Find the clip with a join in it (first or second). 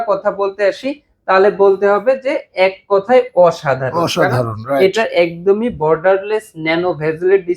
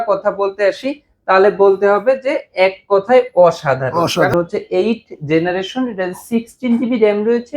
second